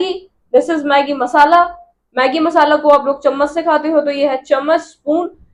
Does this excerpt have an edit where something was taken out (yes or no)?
no